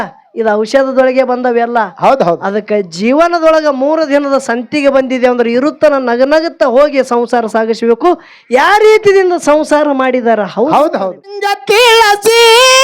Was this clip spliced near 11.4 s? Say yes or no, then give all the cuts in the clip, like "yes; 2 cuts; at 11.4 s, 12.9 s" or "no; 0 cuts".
yes; 1 cut; at 11.4 s